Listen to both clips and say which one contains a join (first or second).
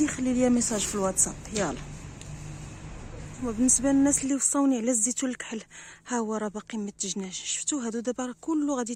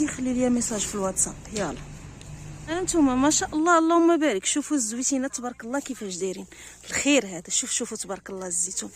second